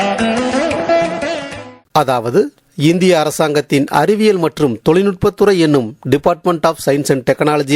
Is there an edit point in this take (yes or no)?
yes